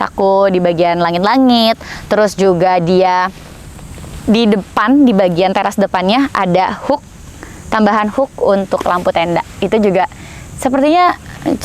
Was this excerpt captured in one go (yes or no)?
yes